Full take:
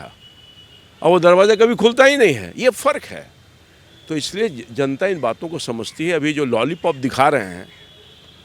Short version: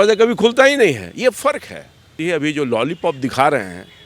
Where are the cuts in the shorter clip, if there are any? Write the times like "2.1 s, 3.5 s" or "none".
2.1 s